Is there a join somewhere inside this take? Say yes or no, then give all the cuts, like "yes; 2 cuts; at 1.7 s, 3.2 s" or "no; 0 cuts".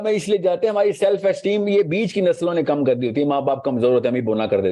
no; 0 cuts